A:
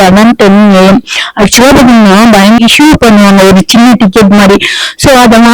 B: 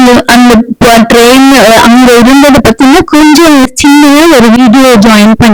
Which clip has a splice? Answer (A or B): A